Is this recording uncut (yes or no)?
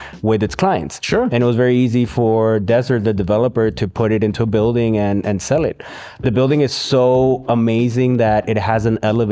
yes